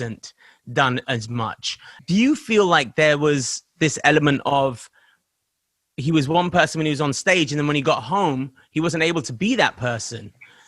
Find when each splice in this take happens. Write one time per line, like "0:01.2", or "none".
0:01.9